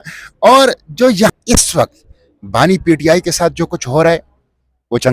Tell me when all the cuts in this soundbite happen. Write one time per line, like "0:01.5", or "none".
0:01.3